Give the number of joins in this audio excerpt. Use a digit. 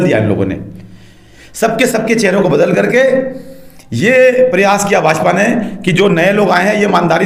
0